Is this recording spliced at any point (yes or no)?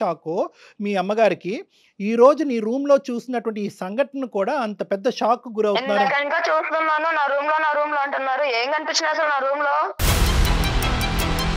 yes